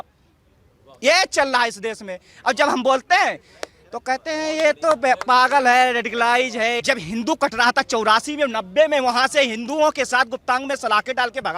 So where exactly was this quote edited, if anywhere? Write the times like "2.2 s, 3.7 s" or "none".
6.8 s